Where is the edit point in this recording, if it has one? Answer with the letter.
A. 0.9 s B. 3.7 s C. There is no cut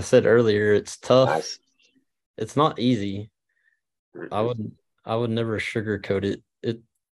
C